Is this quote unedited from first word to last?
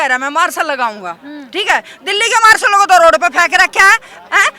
yes; 0 cuts

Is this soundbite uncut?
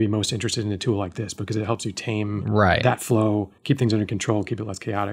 no; 2 cuts; at 2.6 s, 3.5 s

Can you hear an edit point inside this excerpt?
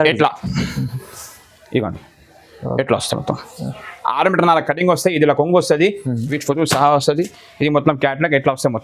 yes; 1 cut; at 6.3 s

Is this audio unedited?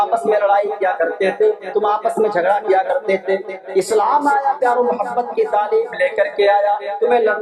yes; 0 cuts

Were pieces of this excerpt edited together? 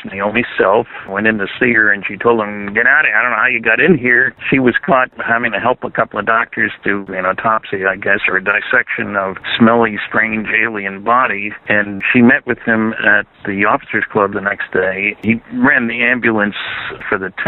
yes; 2 cuts; at 1.0 s, 7.0 s

